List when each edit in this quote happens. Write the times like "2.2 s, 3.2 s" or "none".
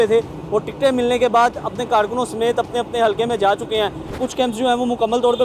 4.1 s